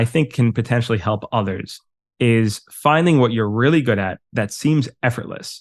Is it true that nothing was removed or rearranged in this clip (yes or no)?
yes